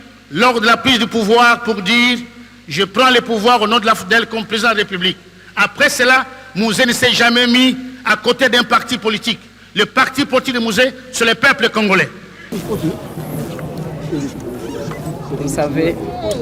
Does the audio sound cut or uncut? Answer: cut